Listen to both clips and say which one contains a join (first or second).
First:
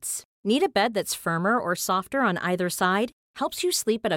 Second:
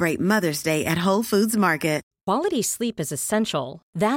second